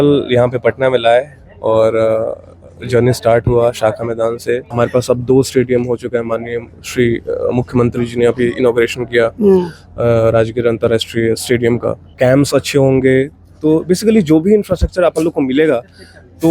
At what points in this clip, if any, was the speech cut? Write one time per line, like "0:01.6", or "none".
0:04.7
0:12.0

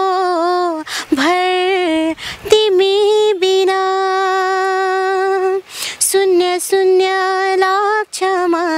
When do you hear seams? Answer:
none

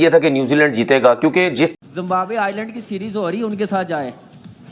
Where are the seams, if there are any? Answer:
0:01.7

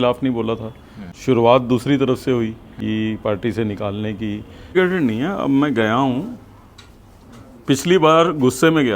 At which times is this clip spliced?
0:01.1
0:02.7
0:04.7

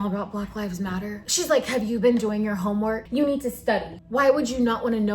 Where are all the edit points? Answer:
0:01.2

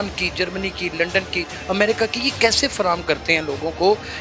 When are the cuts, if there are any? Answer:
none

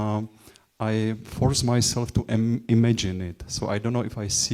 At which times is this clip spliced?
none

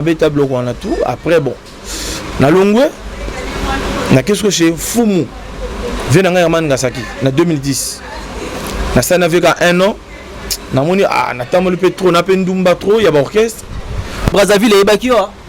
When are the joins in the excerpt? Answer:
0:14.3

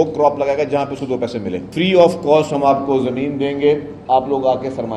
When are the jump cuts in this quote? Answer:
0:01.7

